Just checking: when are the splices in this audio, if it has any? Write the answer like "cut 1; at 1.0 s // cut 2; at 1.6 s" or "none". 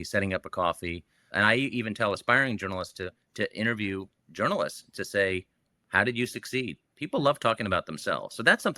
cut 1; at 1.3 s